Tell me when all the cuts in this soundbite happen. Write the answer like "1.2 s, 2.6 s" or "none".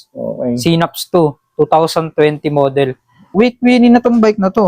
3.3 s